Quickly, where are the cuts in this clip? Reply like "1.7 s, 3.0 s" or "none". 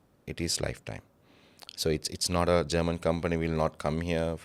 none